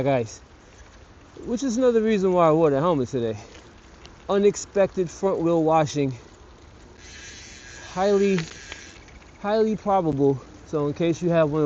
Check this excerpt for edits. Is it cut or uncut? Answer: cut